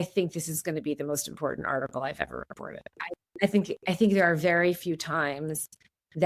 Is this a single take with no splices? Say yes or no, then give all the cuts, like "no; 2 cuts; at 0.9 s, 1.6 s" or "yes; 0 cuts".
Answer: no; 1 cut; at 3.2 s